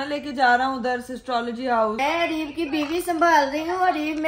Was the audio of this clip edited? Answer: yes; 1 cut; at 2.0 s

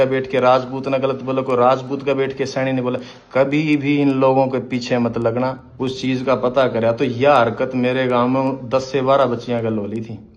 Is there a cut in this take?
yes; 1 cut; at 5.7 s

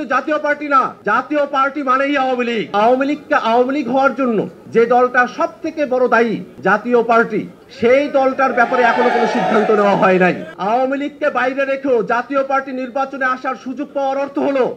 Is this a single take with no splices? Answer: no; 6 cuts; at 0.9 s, 2.7 s, 4.6 s, 6.5 s, 7.6 s, 10.5 s

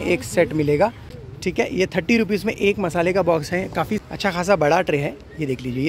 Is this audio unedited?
no; 2 cuts; at 1.2 s, 4.0 s

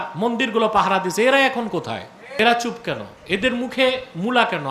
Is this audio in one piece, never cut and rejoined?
no; 1 cut; at 2.4 s

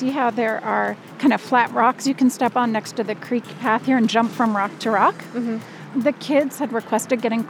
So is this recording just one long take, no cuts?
no; 2 cuts; at 1.0 s, 5.8 s

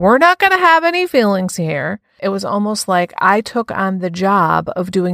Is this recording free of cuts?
no; 1 cut; at 2.1 s

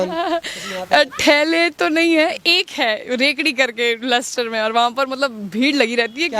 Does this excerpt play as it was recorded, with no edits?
yes; 0 cuts

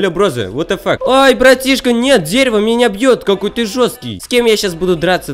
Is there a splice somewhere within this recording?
yes; 2 cuts; at 1.0 s, 4.2 s

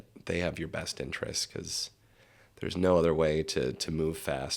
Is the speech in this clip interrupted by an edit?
no; 0 cuts

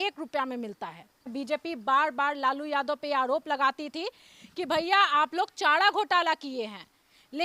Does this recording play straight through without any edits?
no; 1 cut; at 1.3 s

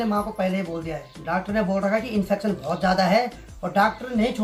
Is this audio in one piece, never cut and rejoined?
yes; 0 cuts

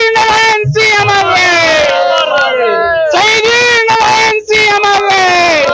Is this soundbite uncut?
yes; 0 cuts

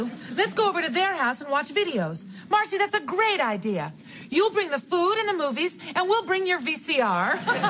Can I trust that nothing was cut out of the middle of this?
yes; 0 cuts

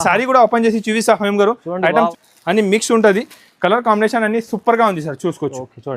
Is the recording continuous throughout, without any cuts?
no; 1 cut; at 2.1 s

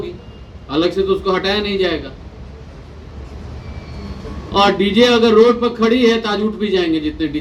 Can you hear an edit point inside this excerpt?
no; 0 cuts

